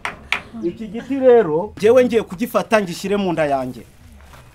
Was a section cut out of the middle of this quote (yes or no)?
yes